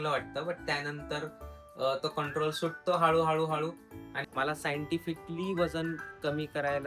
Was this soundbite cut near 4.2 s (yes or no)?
yes